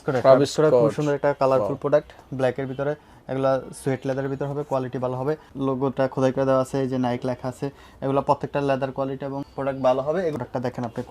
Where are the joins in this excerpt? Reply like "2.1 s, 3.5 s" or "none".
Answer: 5.5 s, 10.3 s